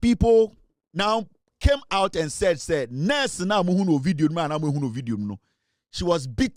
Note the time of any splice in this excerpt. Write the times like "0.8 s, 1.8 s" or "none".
none